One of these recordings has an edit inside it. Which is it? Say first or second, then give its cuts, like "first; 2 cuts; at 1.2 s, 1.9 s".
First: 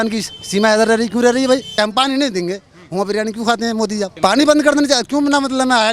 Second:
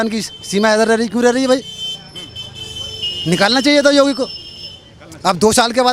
first; 2 cuts; at 1.7 s, 4.1 s